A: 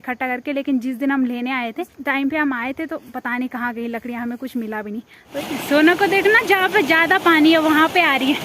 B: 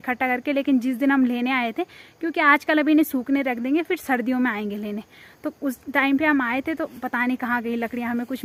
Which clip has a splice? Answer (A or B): A